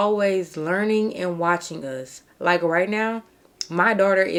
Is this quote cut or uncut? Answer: uncut